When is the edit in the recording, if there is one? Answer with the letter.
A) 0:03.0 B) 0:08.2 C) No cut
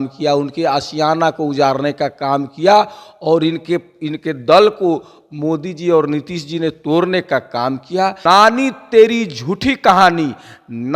B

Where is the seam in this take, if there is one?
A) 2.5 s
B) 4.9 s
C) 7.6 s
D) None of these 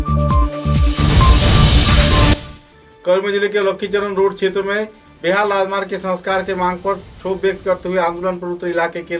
A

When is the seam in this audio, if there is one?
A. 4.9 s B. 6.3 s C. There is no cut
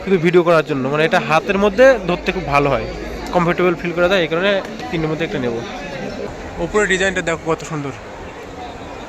B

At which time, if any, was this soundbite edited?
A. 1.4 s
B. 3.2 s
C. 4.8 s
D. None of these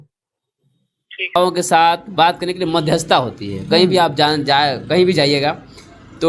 A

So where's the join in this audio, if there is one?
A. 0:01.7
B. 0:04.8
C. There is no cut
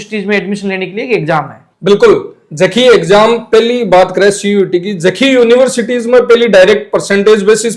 C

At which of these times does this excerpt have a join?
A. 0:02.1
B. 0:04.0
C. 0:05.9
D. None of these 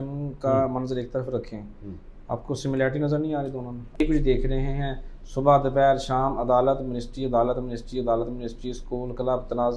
B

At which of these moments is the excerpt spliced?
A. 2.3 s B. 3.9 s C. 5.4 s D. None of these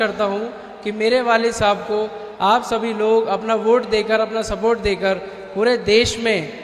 D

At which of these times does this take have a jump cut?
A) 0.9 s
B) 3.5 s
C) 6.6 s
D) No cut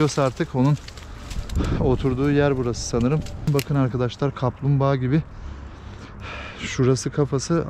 B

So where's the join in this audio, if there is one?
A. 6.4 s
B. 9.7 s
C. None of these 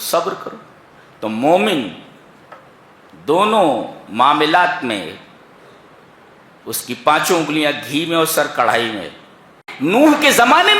B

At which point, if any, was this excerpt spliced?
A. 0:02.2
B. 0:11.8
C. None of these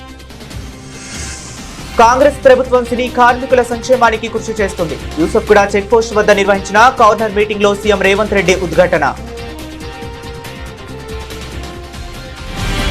B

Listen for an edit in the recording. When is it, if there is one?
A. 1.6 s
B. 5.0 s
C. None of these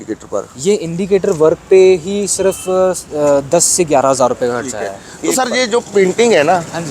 B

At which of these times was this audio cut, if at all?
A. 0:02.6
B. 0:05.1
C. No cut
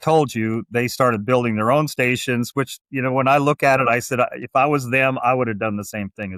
C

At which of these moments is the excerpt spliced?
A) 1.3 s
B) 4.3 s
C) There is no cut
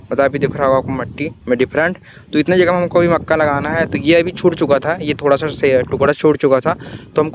C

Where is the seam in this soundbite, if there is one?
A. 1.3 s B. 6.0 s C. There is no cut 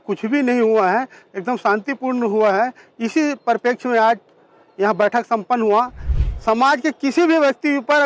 B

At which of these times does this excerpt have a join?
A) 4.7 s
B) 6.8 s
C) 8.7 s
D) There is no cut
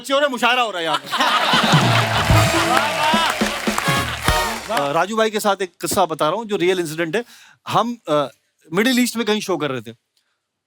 A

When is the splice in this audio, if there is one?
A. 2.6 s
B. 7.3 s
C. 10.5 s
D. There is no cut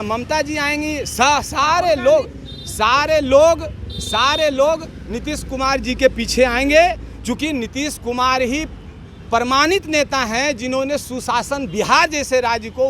D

